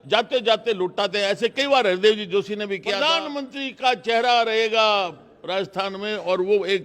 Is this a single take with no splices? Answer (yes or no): no